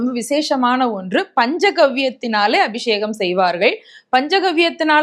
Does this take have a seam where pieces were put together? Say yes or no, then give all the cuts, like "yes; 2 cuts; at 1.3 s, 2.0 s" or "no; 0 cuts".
no; 0 cuts